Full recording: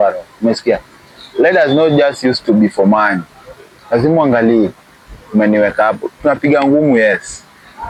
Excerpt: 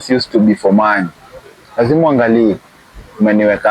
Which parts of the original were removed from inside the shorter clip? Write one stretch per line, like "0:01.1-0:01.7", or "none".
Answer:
none